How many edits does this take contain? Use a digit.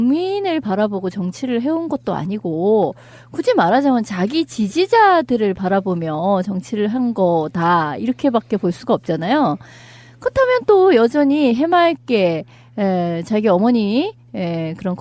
1